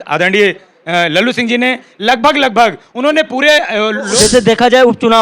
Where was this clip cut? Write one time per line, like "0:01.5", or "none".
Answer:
0:04.1